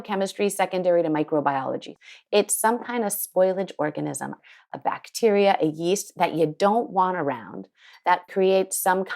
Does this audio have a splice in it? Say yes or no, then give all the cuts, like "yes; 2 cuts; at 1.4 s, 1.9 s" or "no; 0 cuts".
yes; 3 cuts; at 1.9 s, 4.5 s, 8.2 s